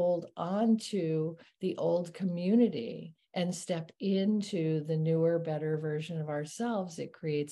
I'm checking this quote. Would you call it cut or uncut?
uncut